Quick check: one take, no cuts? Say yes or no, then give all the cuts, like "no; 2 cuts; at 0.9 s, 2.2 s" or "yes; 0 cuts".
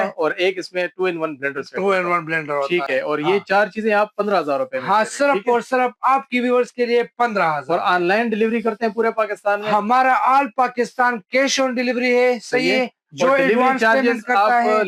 yes; 0 cuts